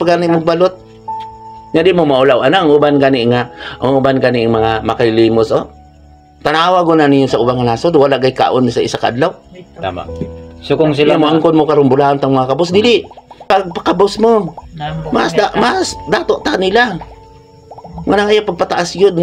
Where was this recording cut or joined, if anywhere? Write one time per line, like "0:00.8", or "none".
0:13.4